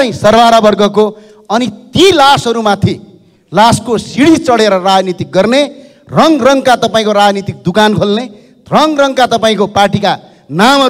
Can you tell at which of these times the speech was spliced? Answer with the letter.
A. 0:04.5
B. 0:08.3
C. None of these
C